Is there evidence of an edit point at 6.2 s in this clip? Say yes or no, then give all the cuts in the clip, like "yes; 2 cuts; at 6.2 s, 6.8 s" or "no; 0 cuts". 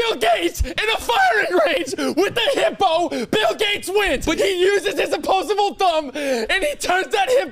no; 1 cut; at 4.4 s